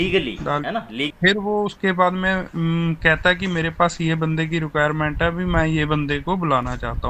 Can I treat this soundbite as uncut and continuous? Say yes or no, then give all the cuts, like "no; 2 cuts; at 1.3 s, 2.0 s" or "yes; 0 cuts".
no; 1 cut; at 1.1 s